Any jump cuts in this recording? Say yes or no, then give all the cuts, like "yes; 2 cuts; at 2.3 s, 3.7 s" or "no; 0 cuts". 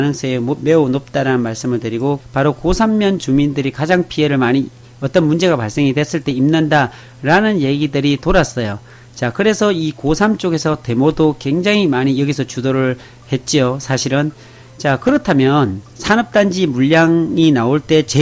yes; 1 cut; at 2.2 s